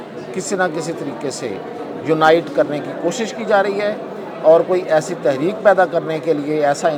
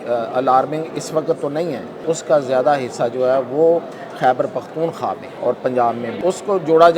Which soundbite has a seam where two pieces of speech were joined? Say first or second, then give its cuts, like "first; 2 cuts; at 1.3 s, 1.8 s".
second; 3 cuts; at 2.0 s, 5.3 s, 6.2 s